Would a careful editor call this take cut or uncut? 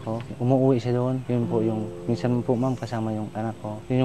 uncut